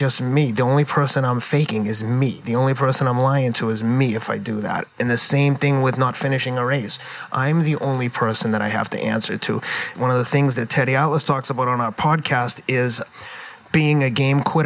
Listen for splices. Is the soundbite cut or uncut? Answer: cut